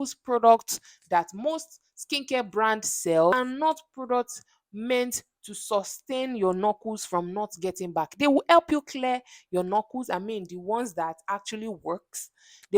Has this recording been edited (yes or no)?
yes